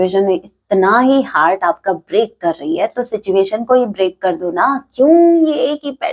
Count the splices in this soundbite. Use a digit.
0